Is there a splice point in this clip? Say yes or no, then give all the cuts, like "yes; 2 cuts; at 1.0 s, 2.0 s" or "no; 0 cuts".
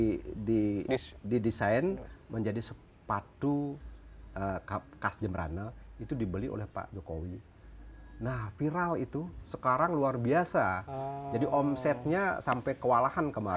no; 0 cuts